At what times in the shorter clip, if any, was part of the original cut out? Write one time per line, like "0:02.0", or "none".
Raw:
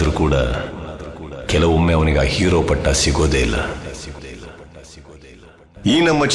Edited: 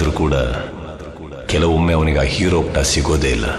0:02.7